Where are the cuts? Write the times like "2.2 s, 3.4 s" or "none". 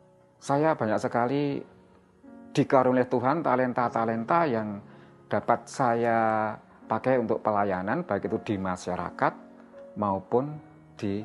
none